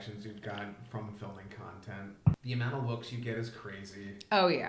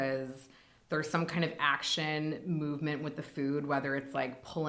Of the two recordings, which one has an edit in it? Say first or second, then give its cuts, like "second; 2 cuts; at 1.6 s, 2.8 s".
first; 1 cut; at 2.4 s